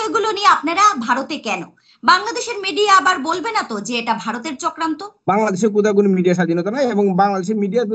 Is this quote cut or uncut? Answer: cut